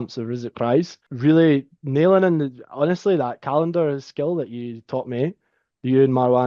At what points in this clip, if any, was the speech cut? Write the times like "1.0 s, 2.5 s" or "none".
1.0 s